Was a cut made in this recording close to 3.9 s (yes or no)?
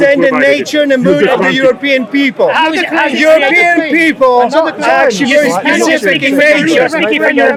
no